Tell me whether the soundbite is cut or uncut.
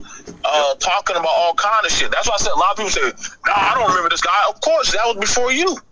uncut